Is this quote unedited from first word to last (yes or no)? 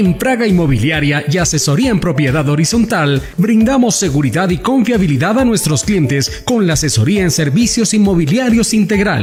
yes